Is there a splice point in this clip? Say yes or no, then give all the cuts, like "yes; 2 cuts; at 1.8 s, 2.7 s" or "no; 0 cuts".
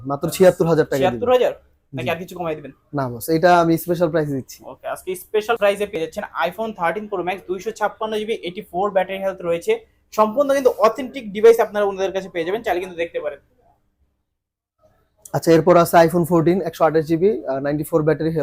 no; 0 cuts